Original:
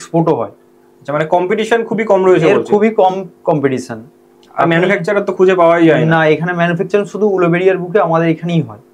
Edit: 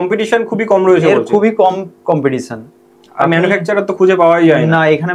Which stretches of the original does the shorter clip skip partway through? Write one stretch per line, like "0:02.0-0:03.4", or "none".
none